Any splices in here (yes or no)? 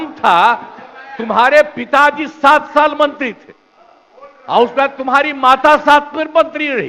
no